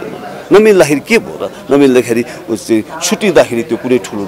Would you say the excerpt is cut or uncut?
uncut